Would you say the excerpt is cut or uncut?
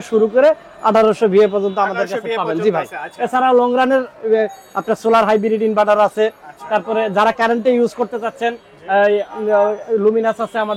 uncut